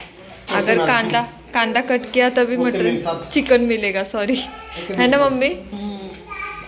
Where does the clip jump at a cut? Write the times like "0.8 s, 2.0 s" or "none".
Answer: none